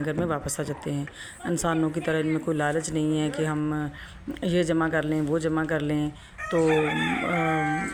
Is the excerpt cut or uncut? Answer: uncut